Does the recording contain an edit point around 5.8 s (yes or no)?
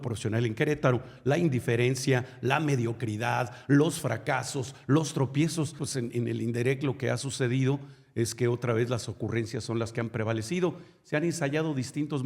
yes